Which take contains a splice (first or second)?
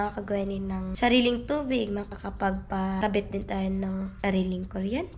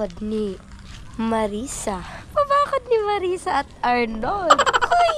first